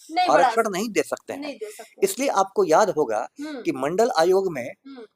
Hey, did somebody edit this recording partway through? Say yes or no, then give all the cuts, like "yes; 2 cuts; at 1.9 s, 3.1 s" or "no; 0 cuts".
no; 0 cuts